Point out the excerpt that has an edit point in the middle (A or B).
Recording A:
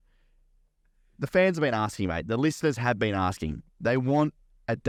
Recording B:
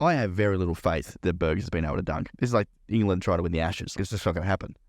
B